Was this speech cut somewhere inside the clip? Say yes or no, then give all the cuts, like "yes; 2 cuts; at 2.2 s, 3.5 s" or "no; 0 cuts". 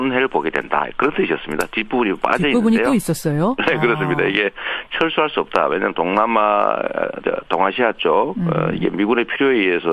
yes; 1 cut; at 8.8 s